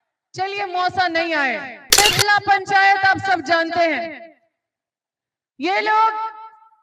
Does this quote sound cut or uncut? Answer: cut